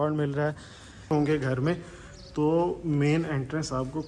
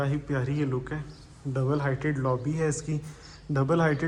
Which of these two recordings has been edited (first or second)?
first